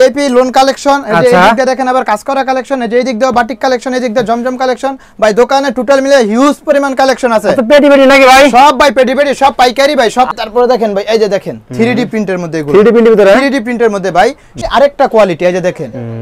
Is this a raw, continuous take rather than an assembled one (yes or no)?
no